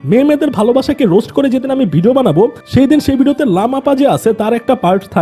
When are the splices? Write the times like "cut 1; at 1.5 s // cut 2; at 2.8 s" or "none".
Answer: none